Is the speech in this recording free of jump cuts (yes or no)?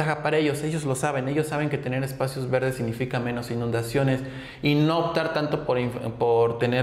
yes